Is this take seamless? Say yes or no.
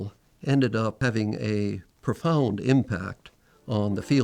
no